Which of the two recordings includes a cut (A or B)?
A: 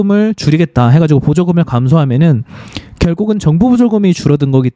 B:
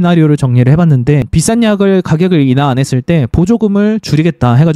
B